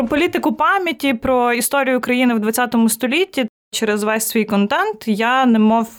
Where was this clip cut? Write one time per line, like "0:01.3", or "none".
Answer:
0:03.7